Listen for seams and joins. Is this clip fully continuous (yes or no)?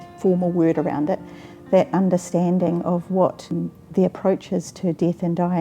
no